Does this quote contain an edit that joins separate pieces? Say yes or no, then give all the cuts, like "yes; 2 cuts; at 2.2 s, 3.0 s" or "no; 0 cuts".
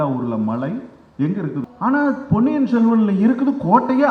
yes; 1 cut; at 1.6 s